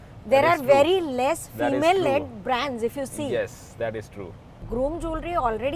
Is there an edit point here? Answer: yes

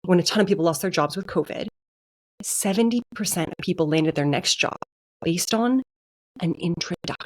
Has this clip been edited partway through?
no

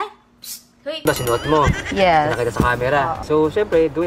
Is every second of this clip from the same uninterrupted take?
no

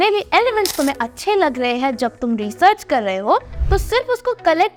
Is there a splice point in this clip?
no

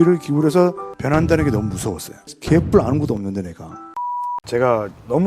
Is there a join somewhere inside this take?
yes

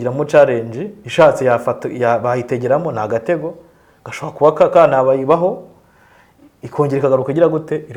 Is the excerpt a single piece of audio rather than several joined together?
yes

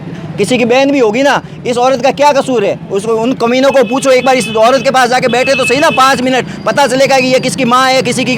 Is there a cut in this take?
no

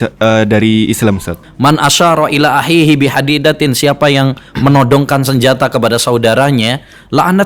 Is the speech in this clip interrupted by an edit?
yes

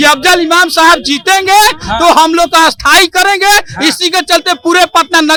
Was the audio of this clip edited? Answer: no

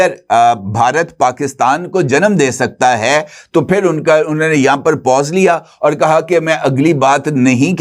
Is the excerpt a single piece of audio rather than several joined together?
yes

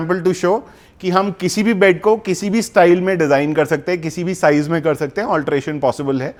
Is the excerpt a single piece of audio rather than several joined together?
yes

